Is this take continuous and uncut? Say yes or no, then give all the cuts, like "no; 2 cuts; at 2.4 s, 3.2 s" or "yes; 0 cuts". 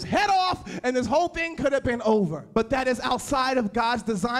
no; 1 cut; at 2.4 s